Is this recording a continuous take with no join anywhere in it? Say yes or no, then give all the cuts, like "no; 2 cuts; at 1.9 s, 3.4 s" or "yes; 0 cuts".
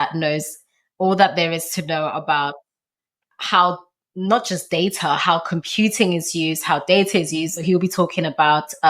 no; 1 cut; at 7.6 s